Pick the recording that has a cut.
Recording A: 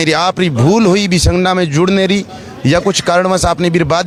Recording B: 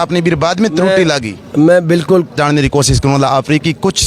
B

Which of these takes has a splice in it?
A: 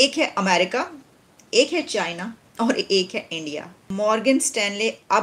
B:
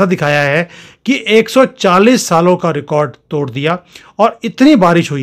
A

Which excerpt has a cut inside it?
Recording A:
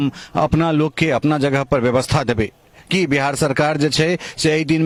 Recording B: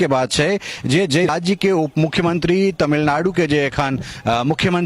B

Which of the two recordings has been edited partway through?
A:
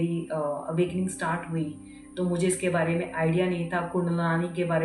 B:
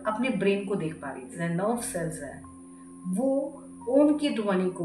B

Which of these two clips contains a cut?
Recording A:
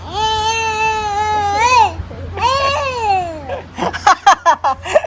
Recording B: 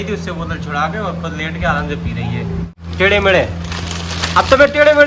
B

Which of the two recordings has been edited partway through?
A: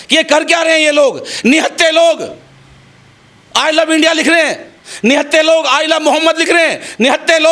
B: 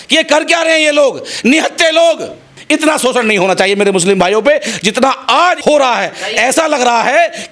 B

